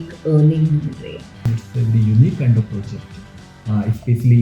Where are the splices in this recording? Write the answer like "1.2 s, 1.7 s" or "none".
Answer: 1.5 s